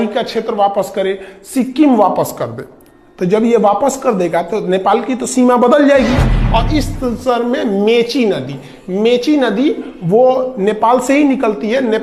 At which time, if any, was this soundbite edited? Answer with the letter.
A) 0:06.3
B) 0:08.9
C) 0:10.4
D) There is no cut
A